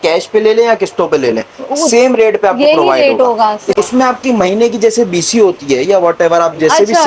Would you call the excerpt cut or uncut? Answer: cut